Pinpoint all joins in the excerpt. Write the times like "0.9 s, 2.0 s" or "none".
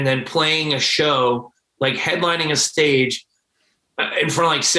1.6 s